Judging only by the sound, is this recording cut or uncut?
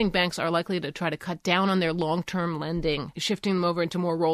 cut